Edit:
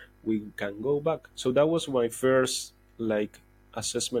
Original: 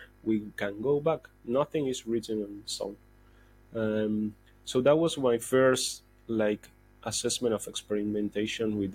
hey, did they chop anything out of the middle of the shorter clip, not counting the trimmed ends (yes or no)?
yes